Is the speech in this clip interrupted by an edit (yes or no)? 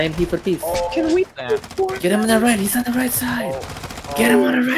no